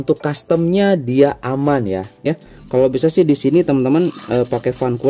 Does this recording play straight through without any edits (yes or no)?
no